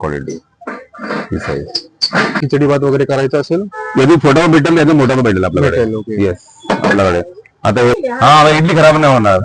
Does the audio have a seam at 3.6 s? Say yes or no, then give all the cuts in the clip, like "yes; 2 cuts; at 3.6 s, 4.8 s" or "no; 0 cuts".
no; 1 cut; at 2.4 s